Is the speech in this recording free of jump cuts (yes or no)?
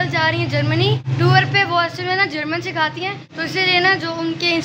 no